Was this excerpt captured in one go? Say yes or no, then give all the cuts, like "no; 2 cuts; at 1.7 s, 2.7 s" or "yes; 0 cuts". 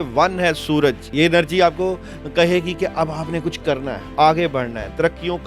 no; 1 cut; at 1.0 s